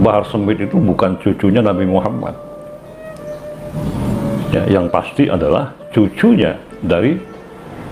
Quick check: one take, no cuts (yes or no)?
yes